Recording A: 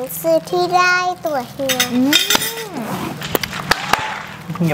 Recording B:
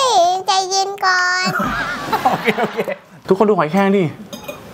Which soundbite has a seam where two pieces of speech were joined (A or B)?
B